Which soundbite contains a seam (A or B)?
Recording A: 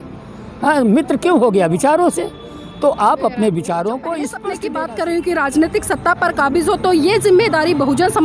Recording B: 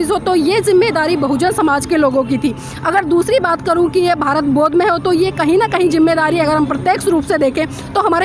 A